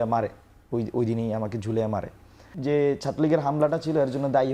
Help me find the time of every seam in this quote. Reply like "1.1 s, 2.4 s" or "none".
2.5 s